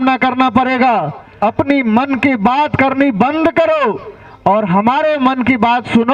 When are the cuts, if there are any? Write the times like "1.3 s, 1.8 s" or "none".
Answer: 1.2 s